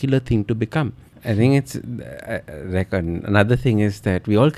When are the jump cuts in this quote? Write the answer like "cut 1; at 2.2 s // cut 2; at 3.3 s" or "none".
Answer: cut 1; at 1.1 s